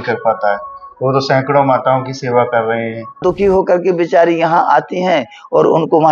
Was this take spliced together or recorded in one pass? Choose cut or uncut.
cut